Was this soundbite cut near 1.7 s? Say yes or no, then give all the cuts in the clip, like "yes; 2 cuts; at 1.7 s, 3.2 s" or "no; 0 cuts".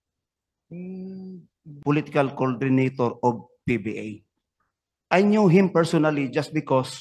yes; 1 cut; at 1.7 s